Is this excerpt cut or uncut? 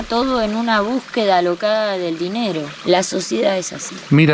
cut